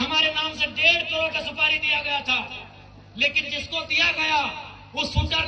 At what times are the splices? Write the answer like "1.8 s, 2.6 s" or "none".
none